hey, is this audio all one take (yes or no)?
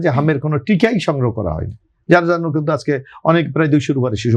yes